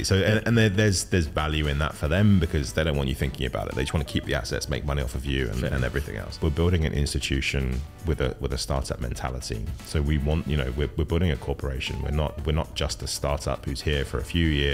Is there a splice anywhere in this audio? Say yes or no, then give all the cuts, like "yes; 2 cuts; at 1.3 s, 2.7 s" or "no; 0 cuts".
yes; 1 cut; at 6.3 s